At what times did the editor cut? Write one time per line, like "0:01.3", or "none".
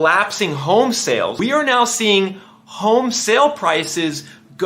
0:01.3